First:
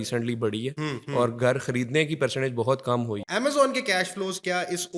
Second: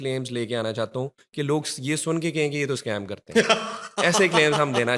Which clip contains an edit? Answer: first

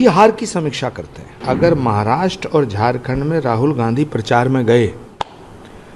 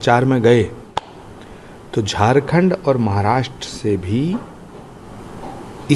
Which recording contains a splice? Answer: first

